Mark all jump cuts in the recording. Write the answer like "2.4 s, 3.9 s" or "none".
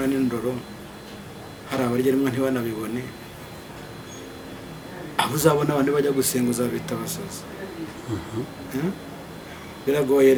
none